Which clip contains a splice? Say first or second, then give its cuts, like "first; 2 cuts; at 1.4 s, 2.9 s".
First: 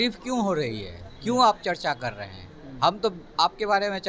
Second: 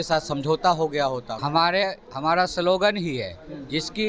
second; 1 cut; at 1.3 s